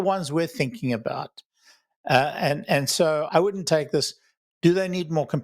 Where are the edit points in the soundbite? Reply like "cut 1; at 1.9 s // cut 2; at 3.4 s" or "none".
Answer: cut 1; at 3.3 s